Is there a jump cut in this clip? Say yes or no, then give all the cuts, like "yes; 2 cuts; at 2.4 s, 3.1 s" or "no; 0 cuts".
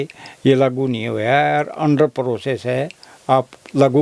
no; 0 cuts